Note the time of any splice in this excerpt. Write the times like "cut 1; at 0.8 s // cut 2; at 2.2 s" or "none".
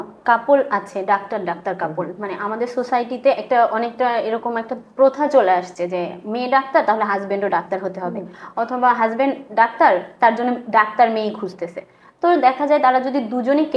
none